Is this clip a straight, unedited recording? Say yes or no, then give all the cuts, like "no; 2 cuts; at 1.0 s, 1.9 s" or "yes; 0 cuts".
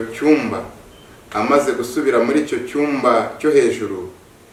yes; 0 cuts